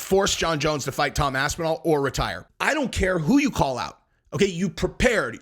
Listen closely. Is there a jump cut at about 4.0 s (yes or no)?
no